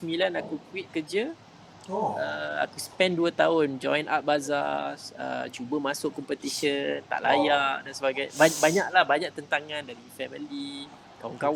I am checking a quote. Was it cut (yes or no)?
no